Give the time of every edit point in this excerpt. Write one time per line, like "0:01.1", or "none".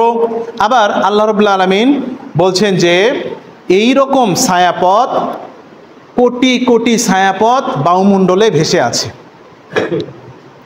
none